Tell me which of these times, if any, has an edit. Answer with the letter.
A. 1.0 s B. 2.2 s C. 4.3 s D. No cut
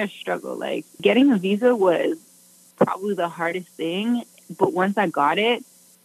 A